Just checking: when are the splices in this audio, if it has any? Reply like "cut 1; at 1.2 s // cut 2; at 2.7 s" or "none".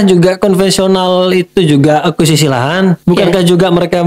cut 1; at 3.0 s